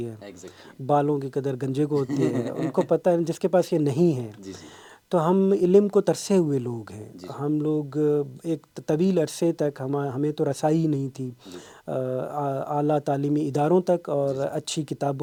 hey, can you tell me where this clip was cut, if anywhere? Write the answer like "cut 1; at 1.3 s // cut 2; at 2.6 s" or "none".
none